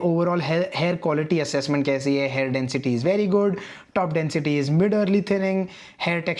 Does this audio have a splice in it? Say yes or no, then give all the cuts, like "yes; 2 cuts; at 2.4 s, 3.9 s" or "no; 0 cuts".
no; 0 cuts